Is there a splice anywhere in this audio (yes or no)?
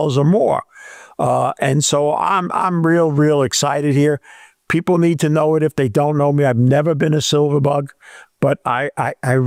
no